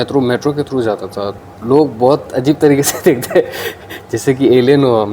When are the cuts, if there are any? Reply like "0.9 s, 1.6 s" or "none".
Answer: 1.4 s